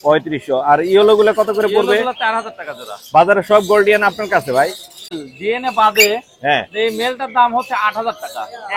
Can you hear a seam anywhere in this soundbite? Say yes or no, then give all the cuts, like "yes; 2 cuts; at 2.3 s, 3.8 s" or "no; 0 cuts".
yes; 1 cut; at 5.1 s